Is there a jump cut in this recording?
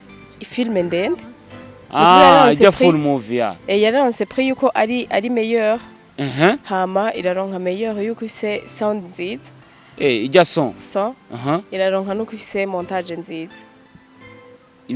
no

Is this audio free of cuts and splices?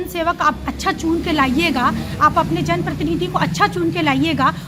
yes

